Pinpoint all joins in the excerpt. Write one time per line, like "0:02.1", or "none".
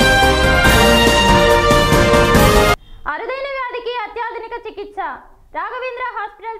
0:02.8